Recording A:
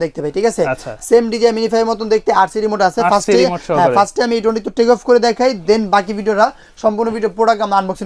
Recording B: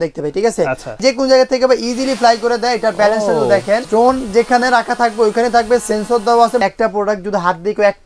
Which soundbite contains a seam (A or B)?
B